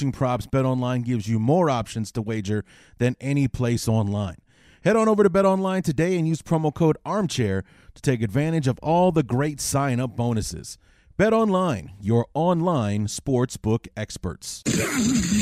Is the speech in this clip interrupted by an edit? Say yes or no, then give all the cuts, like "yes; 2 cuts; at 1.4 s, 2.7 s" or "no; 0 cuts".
yes; 1 cut; at 14.5 s